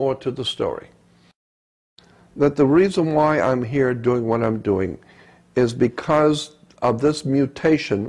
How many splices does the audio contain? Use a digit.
1